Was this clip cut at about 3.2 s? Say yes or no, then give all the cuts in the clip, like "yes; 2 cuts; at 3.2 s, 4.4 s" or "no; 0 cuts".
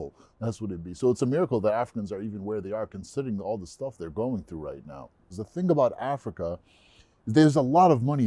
no; 1 cut; at 5.4 s